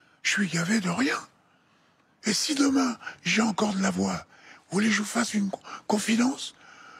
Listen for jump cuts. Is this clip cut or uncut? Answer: uncut